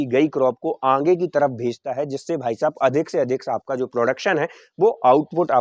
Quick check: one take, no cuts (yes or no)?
yes